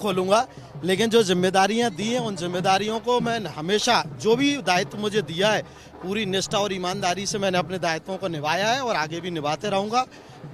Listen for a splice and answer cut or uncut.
uncut